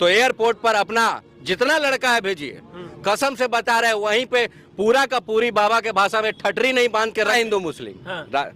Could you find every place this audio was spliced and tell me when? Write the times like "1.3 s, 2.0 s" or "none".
7.3 s